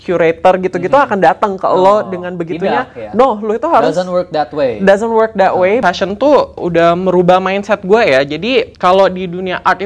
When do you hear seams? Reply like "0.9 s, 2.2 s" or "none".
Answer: 5.8 s, 8.7 s